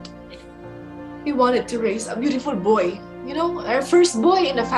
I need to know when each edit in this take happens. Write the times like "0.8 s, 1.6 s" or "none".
none